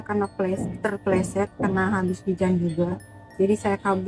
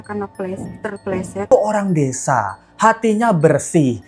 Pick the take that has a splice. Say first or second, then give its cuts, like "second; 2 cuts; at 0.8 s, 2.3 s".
second; 1 cut; at 1.5 s